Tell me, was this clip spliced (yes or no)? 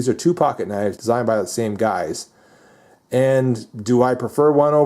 yes